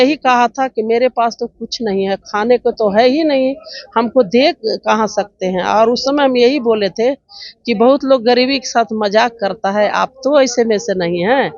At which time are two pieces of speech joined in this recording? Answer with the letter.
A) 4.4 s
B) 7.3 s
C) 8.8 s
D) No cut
D